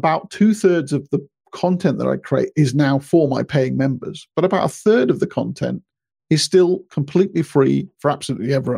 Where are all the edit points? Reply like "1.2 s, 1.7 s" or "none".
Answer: none